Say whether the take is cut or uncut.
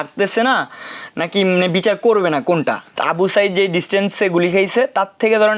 cut